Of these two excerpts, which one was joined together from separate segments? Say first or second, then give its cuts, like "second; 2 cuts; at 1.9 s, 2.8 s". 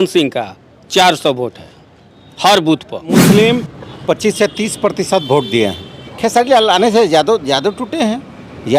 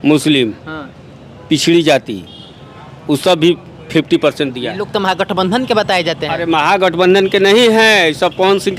first; 2 cuts; at 3.2 s, 5.9 s